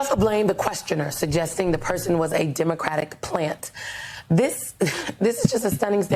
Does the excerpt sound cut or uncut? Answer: uncut